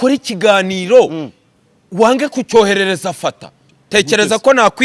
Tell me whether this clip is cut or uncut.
uncut